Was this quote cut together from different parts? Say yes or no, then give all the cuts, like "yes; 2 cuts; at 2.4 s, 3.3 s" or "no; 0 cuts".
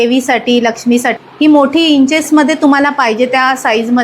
yes; 1 cut; at 1.1 s